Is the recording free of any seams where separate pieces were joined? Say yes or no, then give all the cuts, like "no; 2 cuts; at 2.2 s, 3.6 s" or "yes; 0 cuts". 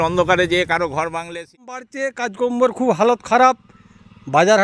no; 1 cut; at 1.8 s